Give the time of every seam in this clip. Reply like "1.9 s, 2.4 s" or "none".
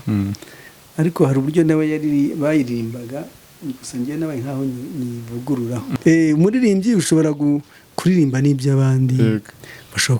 5.9 s